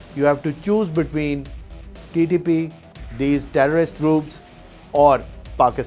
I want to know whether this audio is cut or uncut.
uncut